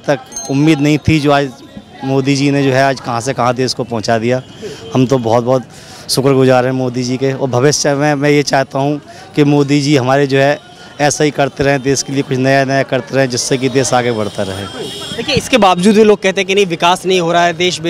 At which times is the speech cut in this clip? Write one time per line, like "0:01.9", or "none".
none